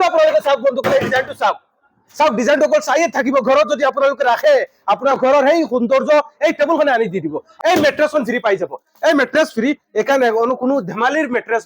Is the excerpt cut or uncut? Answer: cut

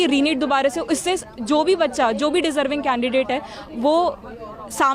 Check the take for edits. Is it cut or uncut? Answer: uncut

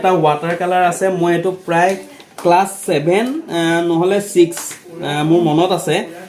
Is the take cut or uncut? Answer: uncut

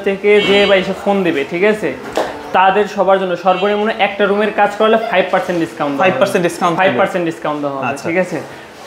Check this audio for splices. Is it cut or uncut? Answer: uncut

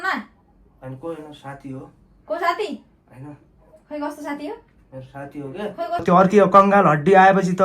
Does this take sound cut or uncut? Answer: cut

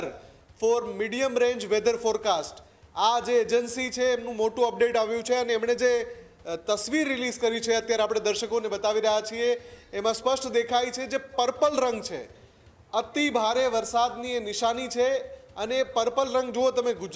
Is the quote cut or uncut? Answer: uncut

